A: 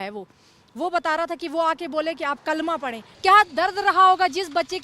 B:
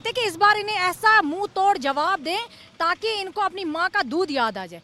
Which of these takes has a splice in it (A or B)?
A